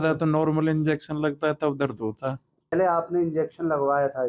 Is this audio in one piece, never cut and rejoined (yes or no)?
no